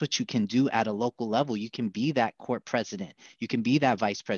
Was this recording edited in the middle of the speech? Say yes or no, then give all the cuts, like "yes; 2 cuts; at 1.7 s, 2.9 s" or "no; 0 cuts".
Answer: no; 0 cuts